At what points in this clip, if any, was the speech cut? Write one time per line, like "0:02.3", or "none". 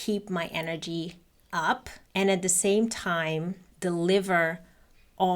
0:02.0
0:03.6